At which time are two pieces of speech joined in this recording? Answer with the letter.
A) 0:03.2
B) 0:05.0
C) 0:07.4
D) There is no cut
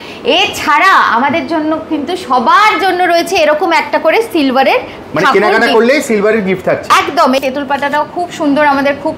C